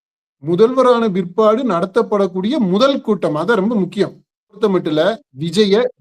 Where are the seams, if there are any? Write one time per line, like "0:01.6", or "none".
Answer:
0:04.6